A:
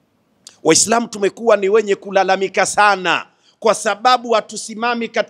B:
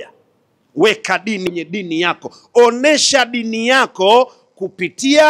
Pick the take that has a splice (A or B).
B